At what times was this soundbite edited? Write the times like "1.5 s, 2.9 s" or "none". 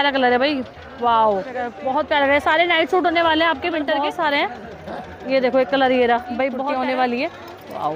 1.8 s, 3.9 s, 6.6 s